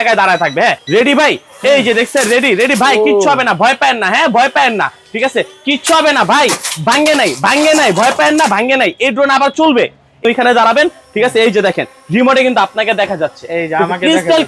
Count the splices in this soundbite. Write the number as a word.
two